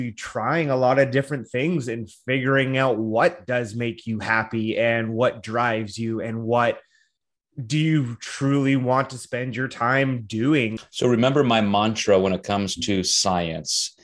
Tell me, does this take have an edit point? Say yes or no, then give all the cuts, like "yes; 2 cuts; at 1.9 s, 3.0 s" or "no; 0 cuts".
yes; 1 cut; at 10.8 s